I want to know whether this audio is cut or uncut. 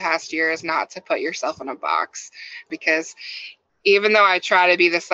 cut